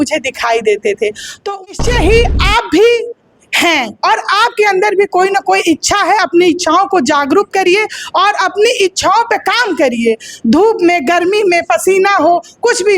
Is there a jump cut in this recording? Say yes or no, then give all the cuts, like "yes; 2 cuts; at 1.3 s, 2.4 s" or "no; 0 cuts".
yes; 1 cut; at 1.7 s